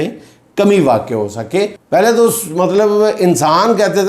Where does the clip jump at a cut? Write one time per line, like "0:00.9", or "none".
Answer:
0:01.8